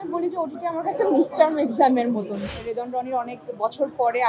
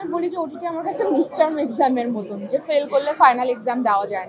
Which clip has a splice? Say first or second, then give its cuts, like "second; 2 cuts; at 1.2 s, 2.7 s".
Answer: first; 1 cut; at 2.4 s